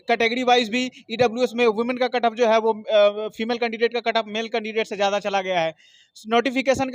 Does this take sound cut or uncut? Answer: uncut